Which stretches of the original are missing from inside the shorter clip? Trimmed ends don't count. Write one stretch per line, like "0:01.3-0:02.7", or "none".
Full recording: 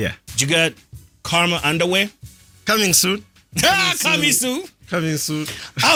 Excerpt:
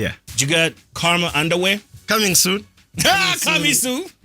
0:00.9-0:01.1
0:02.2-0:02.5